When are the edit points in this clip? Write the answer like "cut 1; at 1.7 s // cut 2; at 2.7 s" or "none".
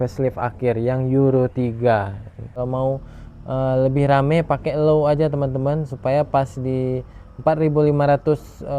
cut 1; at 2.6 s